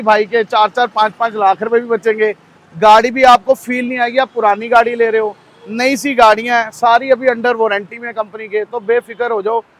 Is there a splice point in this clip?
no; 0 cuts

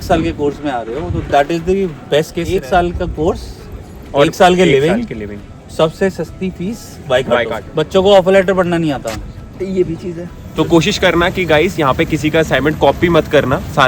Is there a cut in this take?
yes; 3 cuts; at 2.5 s, 7.6 s, 10.4 s

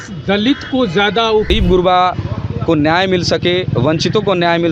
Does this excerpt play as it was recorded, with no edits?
no; 1 cut; at 1.5 s

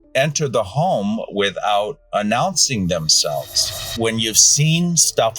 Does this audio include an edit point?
yes; 1 cut; at 3.8 s

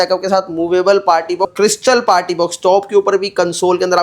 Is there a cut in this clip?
yes; 1 cut; at 1.5 s

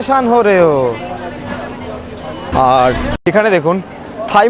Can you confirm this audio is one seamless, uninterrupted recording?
no; 1 cut; at 2.5 s

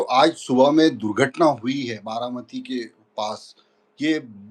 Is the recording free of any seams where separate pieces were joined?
yes; 0 cuts

